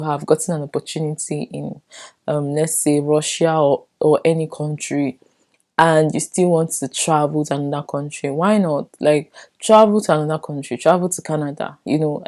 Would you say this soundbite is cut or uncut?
uncut